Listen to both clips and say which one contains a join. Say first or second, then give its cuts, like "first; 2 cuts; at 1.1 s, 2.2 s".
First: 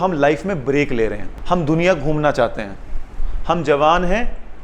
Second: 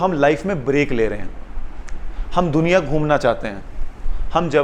first; 1 cut; at 1.3 s